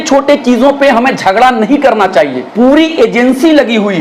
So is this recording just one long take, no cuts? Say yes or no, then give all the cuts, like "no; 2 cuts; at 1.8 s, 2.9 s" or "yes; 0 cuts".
no; 1 cut; at 2.4 s